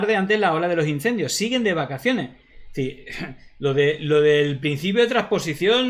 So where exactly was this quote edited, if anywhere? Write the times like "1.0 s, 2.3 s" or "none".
none